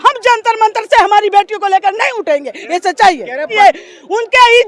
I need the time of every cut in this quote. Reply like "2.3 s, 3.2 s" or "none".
3.5 s